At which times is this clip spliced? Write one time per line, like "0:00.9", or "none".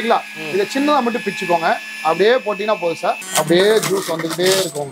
0:03.2